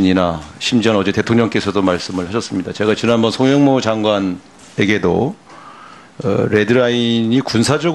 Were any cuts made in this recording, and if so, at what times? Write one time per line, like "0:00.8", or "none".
none